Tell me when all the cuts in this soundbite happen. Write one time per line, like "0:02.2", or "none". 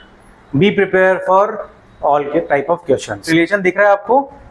0:03.2